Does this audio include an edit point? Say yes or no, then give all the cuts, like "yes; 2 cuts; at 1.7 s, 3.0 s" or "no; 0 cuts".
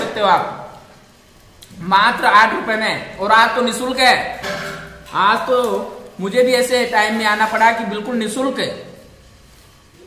no; 0 cuts